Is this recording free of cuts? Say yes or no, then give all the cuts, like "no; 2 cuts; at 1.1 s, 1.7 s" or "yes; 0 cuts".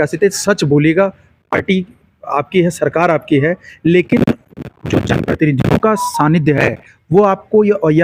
yes; 0 cuts